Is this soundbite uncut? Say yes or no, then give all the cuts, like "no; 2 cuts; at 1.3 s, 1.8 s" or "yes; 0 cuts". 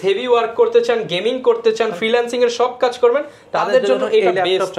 yes; 0 cuts